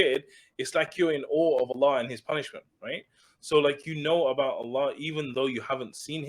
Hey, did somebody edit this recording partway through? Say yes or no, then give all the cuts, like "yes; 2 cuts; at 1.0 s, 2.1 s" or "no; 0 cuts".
no; 0 cuts